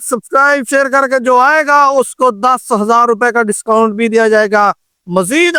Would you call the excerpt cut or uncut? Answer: uncut